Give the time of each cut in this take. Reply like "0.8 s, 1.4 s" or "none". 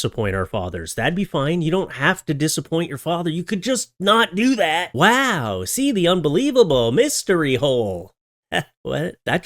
none